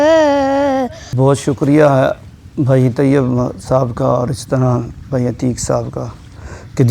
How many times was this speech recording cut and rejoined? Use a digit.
1